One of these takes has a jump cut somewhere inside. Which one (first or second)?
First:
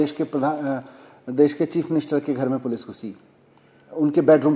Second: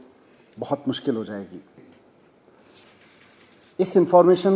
second